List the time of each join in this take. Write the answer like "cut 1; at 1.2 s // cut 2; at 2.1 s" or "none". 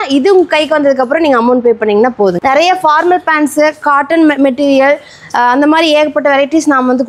cut 1; at 2.4 s